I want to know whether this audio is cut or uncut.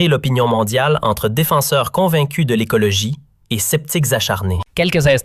cut